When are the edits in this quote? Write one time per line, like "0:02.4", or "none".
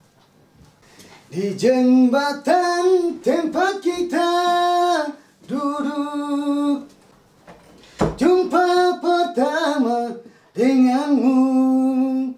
0:00.9
0:07.0